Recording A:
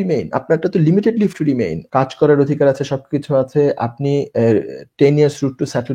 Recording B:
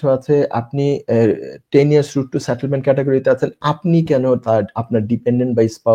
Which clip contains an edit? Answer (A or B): A